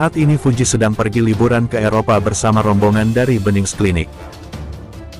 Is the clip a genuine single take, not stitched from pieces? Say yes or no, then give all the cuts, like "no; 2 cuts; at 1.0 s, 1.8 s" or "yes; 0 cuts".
no; 1 cut; at 4.1 s